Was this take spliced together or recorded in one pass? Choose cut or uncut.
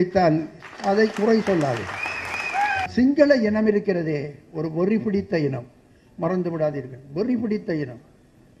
cut